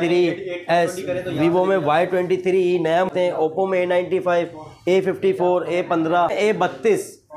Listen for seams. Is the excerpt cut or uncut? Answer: cut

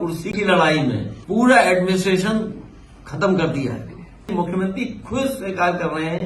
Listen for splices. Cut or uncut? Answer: cut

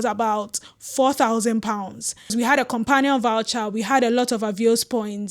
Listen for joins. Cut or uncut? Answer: cut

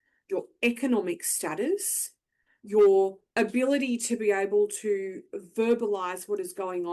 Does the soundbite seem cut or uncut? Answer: cut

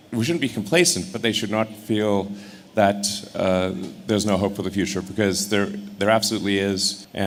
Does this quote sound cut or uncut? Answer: uncut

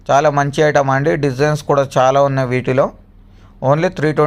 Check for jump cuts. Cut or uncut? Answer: uncut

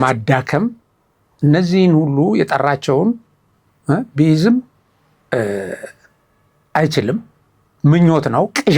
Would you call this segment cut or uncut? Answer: uncut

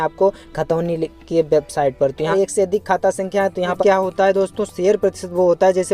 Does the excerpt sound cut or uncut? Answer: cut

